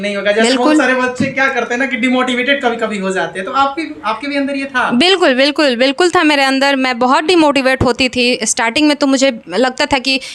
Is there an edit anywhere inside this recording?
no; 0 cuts

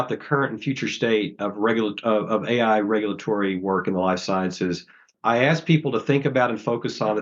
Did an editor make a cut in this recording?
yes; 1 cut; at 5.1 s

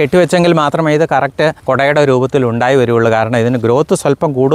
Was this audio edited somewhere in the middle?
yes; 1 cut; at 1.6 s

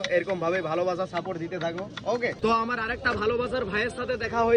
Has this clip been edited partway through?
yes; 1 cut; at 2.4 s

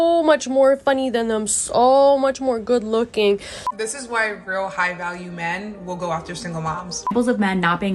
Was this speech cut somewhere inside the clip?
yes; 2 cuts; at 3.8 s, 7.1 s

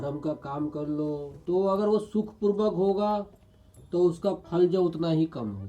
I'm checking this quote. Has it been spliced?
yes; 2 cuts; at 1.3 s, 3.7 s

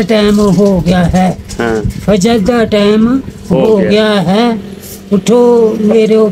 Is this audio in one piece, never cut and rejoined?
yes; 0 cuts

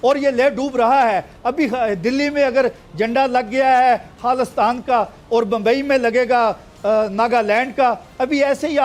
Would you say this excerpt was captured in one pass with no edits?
yes; 0 cuts

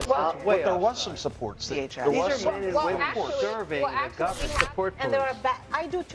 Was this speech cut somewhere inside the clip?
yes; 1 cut; at 4.6 s

